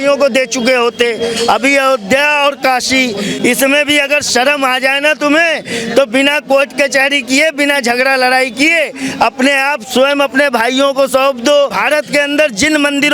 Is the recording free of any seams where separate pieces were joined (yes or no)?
no